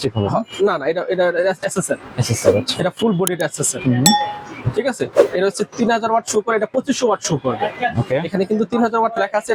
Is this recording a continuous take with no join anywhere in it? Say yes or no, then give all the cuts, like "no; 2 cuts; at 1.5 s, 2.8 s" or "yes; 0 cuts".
yes; 0 cuts